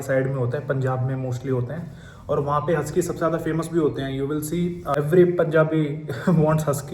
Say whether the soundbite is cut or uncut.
cut